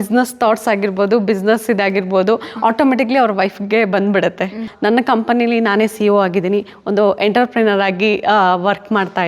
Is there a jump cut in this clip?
yes; 1 cut; at 4.7 s

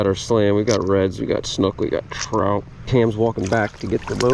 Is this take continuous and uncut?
no; 1 cut; at 2.8 s

